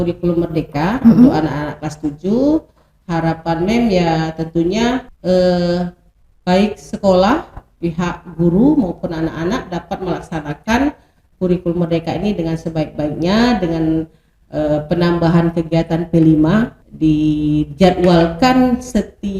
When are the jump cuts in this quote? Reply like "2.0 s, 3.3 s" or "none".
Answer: 5.1 s, 16.8 s